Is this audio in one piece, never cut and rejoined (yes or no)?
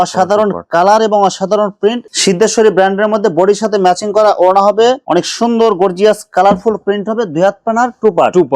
no